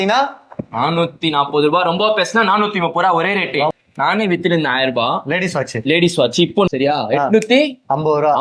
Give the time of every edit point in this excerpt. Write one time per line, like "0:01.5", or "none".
0:03.7
0:06.7